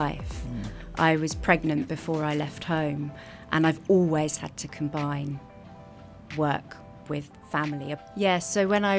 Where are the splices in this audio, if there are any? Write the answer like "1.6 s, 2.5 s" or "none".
8.0 s